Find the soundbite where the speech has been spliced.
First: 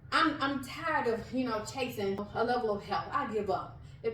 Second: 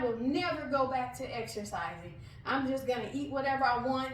first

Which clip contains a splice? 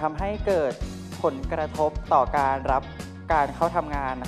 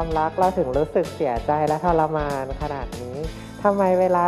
second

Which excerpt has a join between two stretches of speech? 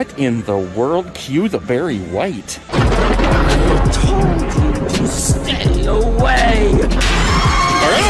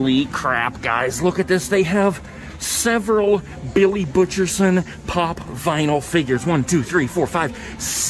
first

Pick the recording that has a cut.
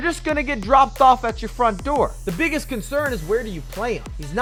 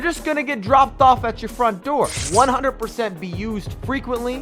second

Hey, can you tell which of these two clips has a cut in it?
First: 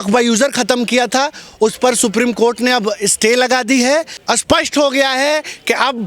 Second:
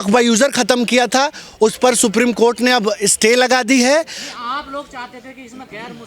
first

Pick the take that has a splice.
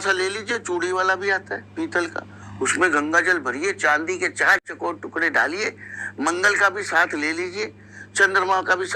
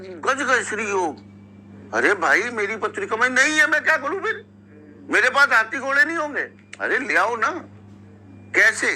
second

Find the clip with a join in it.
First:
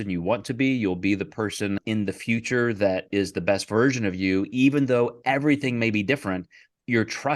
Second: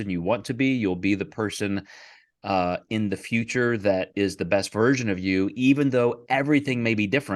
first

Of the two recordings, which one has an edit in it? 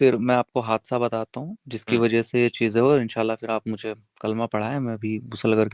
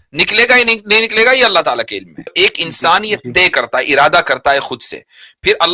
second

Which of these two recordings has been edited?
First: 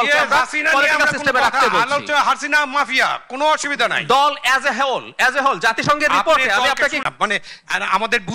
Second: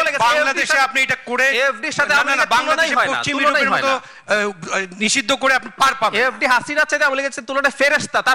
first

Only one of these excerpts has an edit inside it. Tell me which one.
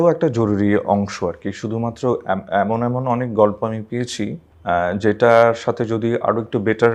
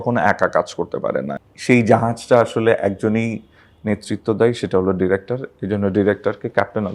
second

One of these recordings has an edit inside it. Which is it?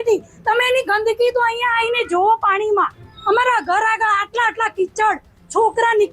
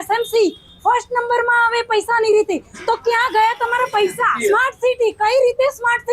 second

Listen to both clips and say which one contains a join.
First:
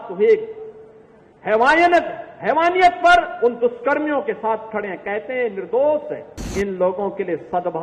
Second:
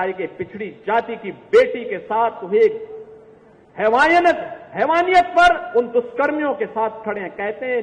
first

